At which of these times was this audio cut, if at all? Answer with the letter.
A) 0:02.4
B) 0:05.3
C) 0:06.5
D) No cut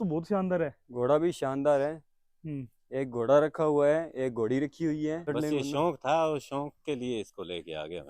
B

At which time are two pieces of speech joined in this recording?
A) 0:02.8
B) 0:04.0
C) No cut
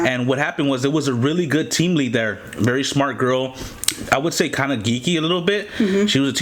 C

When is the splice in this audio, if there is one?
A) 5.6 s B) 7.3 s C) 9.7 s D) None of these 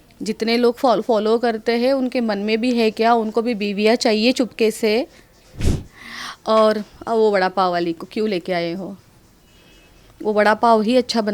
A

